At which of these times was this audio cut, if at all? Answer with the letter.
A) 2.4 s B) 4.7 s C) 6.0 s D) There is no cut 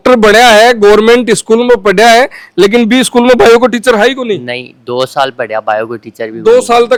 D